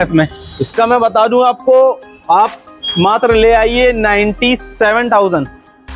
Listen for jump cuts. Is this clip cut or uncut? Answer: uncut